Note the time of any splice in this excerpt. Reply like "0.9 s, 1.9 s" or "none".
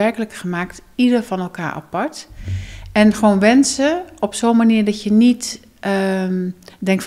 none